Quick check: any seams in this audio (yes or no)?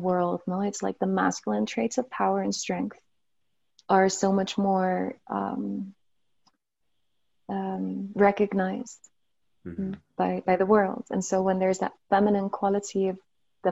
no